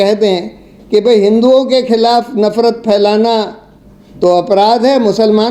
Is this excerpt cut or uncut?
uncut